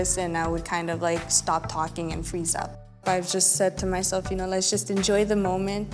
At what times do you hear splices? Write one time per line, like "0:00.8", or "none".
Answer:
0:03.0

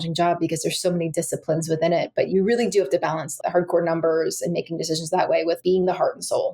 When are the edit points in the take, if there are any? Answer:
0:02.3
0:03.4
0:05.6

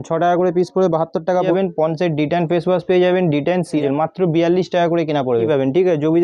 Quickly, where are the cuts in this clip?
0:01.5
0:03.8
0:05.5

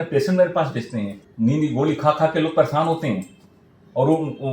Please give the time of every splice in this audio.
0:01.2

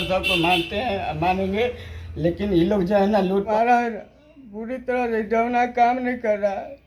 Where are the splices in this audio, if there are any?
0:03.5

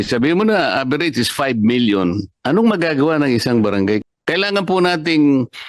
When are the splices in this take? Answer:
0:02.3
0:04.0

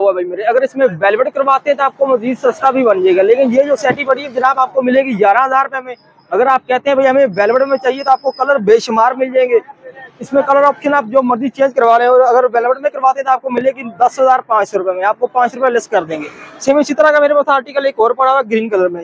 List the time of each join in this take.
none

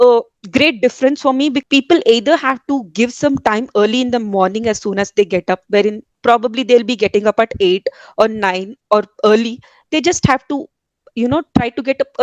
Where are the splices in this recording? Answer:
0:01.6

